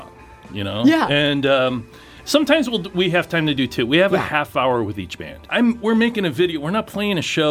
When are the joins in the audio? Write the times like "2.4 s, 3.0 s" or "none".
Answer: 2.1 s, 5.4 s